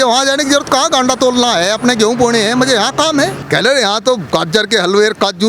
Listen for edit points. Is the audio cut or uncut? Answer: cut